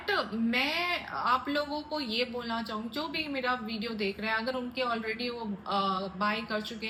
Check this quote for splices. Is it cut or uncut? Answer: uncut